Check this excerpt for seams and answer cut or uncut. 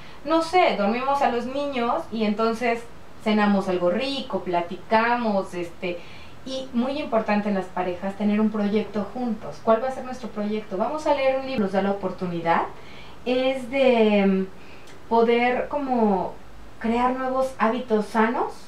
cut